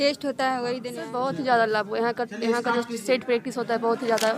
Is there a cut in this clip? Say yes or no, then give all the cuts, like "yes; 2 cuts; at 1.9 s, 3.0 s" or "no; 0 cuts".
yes; 1 cut; at 0.9 s